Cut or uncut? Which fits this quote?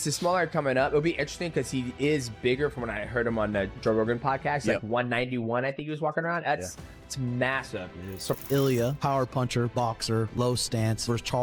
cut